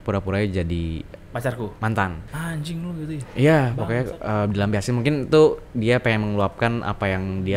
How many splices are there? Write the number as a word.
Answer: zero